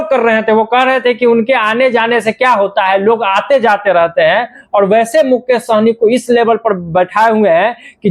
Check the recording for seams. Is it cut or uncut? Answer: uncut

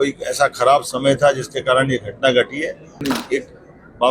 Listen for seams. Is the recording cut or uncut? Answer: cut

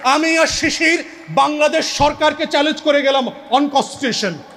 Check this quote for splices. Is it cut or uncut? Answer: uncut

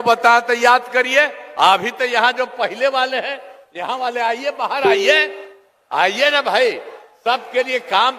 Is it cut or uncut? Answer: uncut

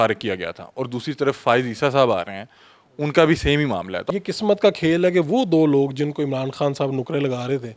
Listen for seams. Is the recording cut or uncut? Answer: cut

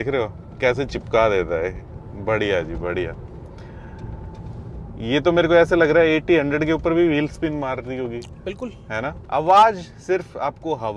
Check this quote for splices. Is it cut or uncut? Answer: uncut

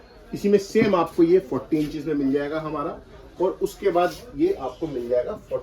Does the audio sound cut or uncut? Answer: uncut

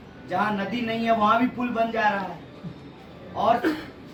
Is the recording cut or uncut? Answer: uncut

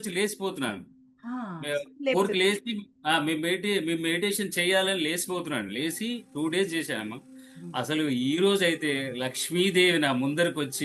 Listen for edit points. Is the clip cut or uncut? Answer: uncut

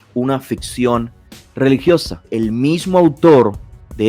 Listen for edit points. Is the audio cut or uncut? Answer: cut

